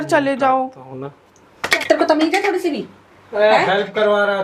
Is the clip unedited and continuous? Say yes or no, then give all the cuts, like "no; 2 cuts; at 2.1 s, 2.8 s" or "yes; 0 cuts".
no; 1 cut; at 1.8 s